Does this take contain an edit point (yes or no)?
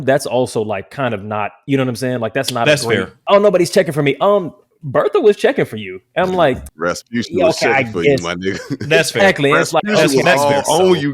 yes